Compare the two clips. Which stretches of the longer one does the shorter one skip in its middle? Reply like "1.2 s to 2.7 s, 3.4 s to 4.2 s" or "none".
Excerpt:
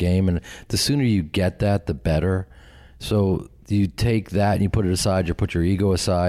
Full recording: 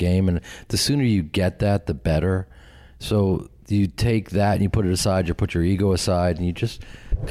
none

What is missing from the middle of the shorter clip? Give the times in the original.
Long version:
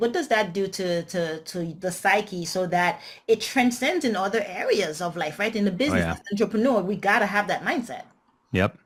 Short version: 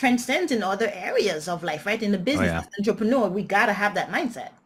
none

